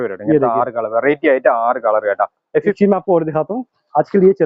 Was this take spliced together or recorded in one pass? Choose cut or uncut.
cut